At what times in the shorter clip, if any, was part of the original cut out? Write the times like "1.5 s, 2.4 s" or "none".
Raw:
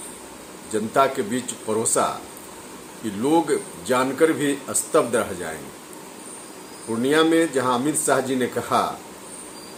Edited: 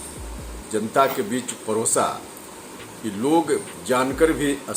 none